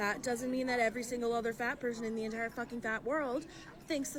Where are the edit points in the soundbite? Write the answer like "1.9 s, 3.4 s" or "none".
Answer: none